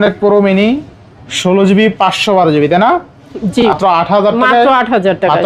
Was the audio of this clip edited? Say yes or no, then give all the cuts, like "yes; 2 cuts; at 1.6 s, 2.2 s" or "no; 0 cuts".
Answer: yes; 1 cut; at 3.7 s